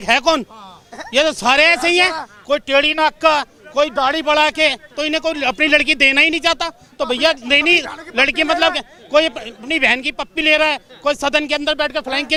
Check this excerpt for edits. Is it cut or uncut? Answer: uncut